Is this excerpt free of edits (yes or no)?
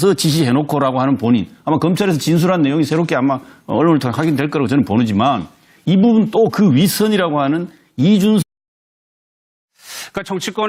yes